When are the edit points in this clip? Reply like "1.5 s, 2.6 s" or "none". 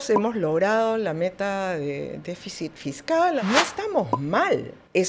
3.4 s